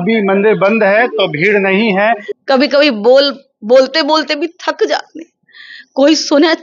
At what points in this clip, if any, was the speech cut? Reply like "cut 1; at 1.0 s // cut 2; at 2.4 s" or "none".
cut 1; at 2.3 s